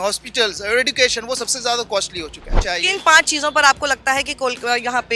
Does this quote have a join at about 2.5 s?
yes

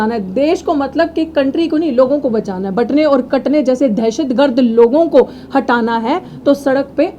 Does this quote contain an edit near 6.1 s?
no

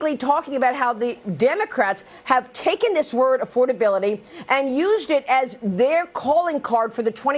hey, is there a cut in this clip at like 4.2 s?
no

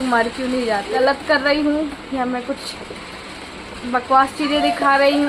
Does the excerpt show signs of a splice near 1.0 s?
yes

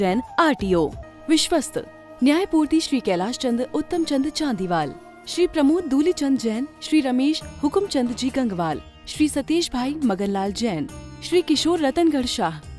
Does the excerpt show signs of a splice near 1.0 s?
yes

